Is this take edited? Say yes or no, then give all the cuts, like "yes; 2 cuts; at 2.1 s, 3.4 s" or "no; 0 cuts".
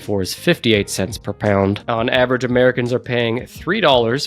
yes; 1 cut; at 1.8 s